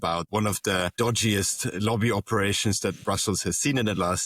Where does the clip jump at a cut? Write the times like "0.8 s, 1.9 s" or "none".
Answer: 0.9 s

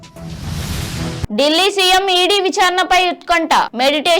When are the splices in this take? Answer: 1.2 s

